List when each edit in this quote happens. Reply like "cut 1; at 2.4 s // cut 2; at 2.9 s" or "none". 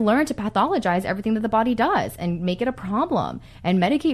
none